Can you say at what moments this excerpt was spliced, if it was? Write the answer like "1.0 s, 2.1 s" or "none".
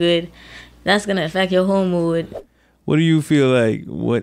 2.4 s